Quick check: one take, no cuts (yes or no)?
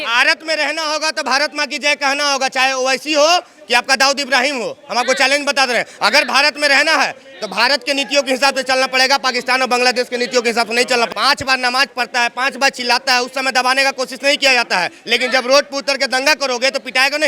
no